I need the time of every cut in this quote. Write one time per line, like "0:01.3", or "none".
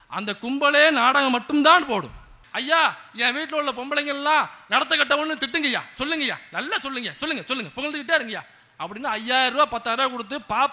0:02.4